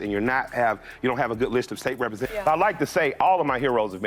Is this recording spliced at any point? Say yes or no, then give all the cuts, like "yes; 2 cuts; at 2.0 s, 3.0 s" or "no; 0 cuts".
yes; 1 cut; at 2.2 s